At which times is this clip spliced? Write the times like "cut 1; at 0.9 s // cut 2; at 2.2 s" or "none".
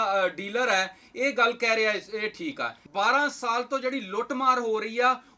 cut 1; at 2.7 s

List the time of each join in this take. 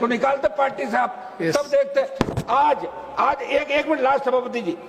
none

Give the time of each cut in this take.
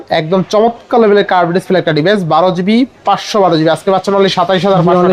none

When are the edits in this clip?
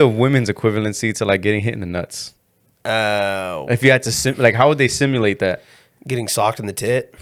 none

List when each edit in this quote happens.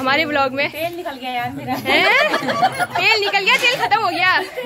none

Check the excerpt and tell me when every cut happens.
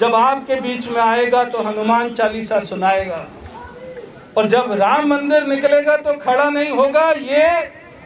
none

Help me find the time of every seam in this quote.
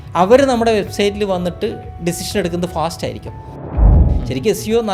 cut 1; at 3.8 s

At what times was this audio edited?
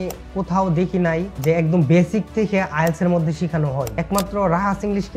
cut 1; at 1.3 s // cut 2; at 3.9 s

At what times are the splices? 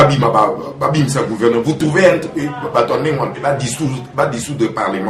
cut 1; at 3.4 s

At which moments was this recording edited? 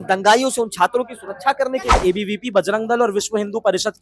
cut 1; at 1.9 s

